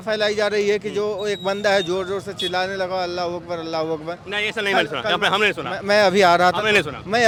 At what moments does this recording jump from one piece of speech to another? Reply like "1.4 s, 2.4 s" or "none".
none